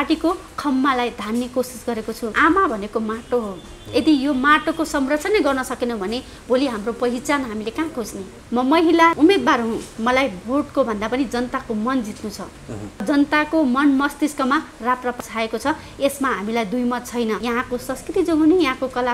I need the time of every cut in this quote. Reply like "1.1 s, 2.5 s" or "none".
2.3 s, 8.4 s, 9.2 s, 13.0 s, 17.4 s